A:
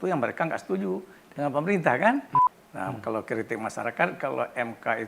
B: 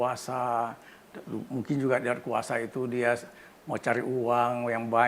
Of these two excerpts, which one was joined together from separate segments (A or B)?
A